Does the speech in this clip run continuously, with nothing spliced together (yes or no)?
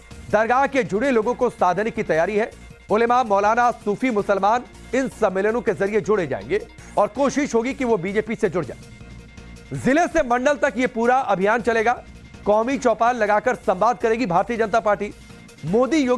yes